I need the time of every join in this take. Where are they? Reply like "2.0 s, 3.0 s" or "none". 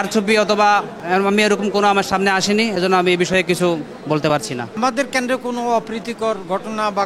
0.9 s, 4.2 s